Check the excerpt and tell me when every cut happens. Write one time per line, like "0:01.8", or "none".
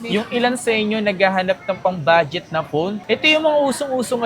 0:03.0